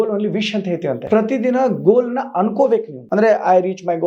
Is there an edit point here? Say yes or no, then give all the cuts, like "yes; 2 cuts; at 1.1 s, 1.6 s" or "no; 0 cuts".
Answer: yes; 2 cuts; at 1.0 s, 3.0 s